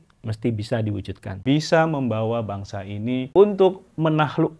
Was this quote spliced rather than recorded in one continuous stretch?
yes; 2 cuts; at 1.3 s, 3.3 s

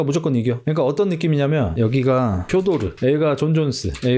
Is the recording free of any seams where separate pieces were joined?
no; 1 cut; at 2.9 s

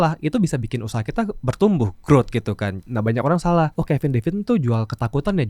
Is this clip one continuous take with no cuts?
no; 2 cuts; at 2.8 s, 3.7 s

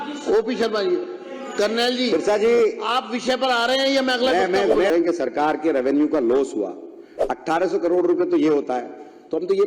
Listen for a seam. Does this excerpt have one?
yes; 1 cut; at 4.9 s

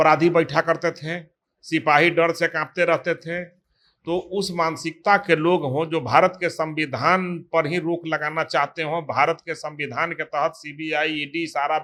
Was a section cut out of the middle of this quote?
no; 0 cuts

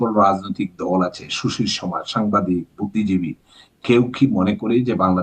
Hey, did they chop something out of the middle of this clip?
no; 0 cuts

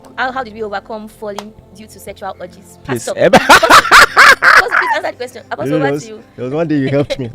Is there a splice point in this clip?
no; 0 cuts

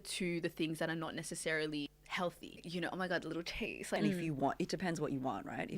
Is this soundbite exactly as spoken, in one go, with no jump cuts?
no; 2 cuts; at 2.5 s, 4.0 s

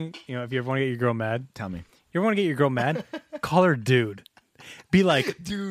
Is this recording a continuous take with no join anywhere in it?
no; 1 cut; at 1.9 s

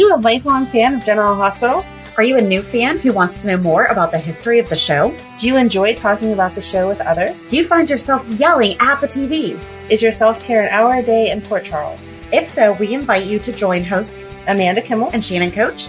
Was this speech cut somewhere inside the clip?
no; 0 cuts

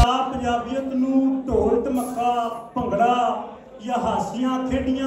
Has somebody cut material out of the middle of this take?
no; 0 cuts

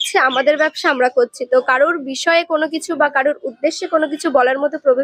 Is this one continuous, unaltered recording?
yes; 0 cuts

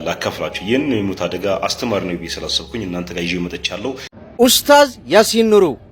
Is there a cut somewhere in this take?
yes; 1 cut; at 4.1 s

